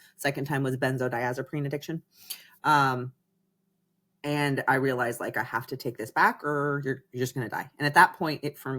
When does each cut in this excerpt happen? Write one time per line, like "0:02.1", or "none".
none